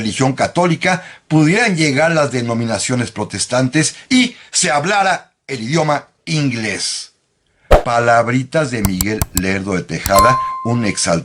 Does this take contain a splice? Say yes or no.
no